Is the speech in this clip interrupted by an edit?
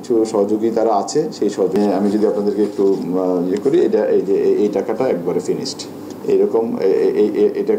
yes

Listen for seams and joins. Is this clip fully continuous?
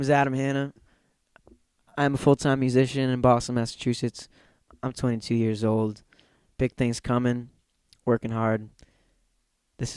yes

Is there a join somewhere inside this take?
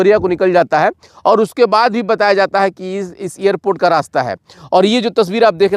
no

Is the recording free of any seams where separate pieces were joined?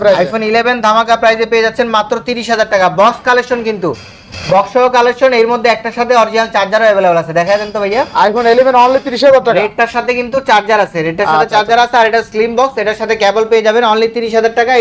yes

